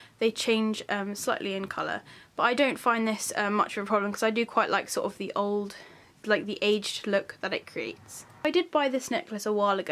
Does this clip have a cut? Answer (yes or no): no